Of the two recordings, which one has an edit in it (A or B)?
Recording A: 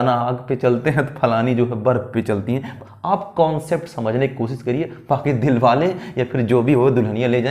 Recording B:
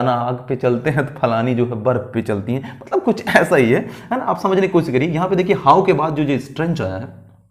A